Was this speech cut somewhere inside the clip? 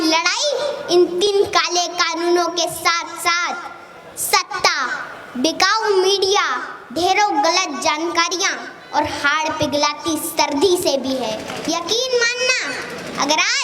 yes; 2 cuts; at 1.3 s, 11.5 s

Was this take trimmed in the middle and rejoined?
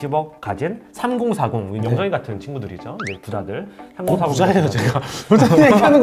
no; 0 cuts

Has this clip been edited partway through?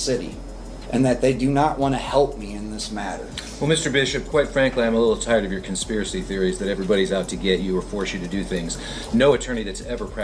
no; 0 cuts

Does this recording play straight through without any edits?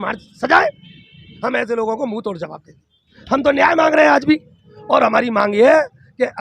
no; 3 cuts; at 1.3 s, 3.1 s, 4.7 s

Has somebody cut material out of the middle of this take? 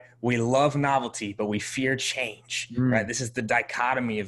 no; 0 cuts

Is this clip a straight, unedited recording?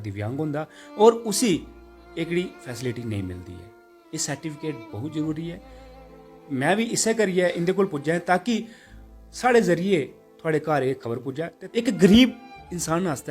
no; 1 cut; at 11.6 s

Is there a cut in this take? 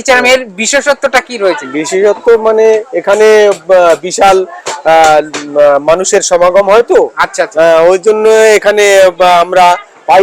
no; 0 cuts

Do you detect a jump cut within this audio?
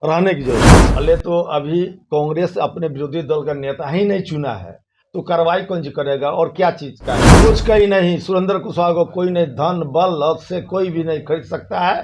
yes; 2 cuts; at 0.9 s, 7.3 s

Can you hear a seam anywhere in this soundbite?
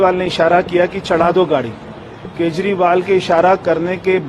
no; 0 cuts

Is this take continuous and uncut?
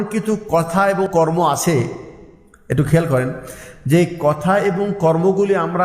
no; 1 cut; at 1.1 s

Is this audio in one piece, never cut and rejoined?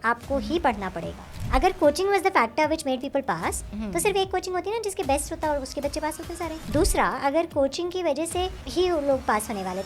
no; 3 cuts; at 1.3 s, 6.6 s, 8.6 s

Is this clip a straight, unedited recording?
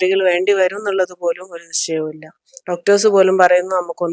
yes; 0 cuts

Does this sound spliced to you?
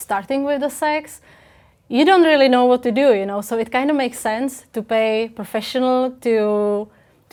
no; 0 cuts

